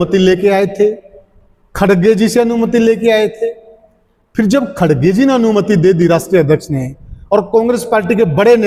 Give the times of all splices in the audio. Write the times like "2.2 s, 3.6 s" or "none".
none